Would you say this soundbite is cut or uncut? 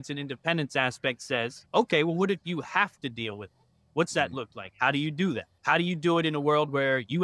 cut